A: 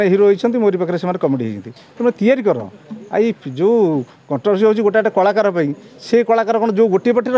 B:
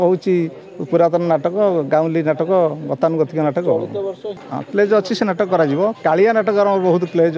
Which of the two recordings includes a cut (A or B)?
B